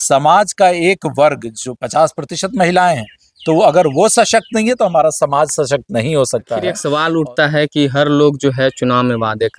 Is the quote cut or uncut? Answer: cut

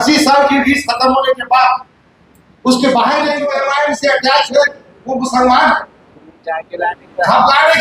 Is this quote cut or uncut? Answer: cut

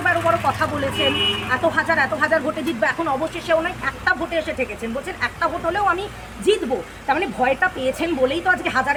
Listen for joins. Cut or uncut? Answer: uncut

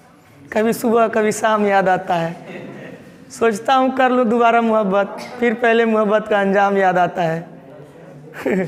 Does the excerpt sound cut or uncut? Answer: uncut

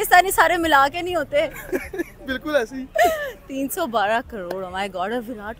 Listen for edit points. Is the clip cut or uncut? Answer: uncut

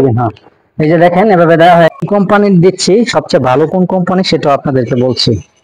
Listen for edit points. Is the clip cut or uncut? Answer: cut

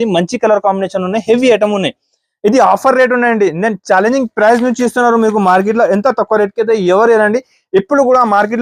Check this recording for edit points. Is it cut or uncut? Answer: uncut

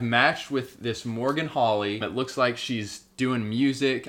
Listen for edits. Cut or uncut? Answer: cut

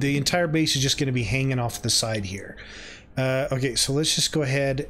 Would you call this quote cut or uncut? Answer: uncut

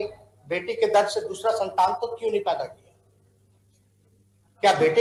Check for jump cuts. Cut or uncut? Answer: uncut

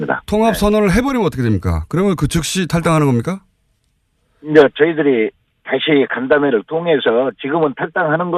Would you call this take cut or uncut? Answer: uncut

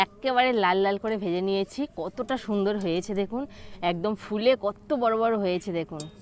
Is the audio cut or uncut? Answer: uncut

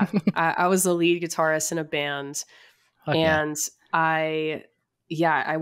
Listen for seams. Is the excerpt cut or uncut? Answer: uncut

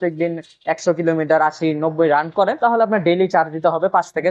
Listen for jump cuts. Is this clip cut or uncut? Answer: uncut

